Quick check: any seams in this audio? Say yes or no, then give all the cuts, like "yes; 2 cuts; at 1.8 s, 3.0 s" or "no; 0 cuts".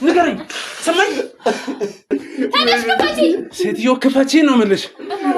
yes; 1 cut; at 2.0 s